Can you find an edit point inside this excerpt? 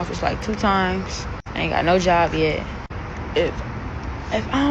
no; 0 cuts

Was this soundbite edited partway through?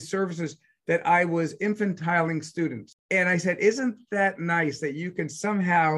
yes; 1 cut; at 2.9 s

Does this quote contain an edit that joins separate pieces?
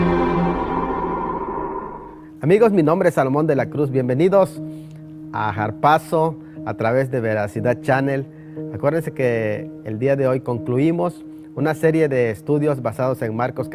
no; 0 cuts

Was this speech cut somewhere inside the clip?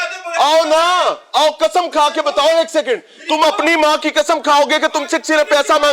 no; 0 cuts

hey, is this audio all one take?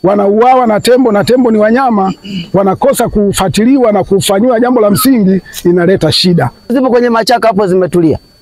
no; 1 cut; at 6.7 s

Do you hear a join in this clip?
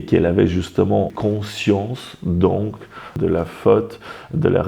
yes; 1 cut; at 1.1 s

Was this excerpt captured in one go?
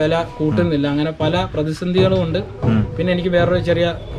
yes; 0 cuts

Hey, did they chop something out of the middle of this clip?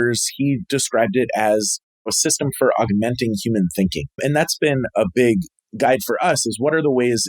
yes; 1 cut; at 5.6 s

